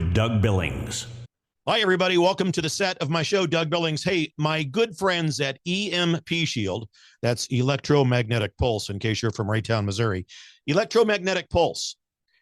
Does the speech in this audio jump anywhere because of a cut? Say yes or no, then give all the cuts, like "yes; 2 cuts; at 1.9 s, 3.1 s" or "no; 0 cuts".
no; 0 cuts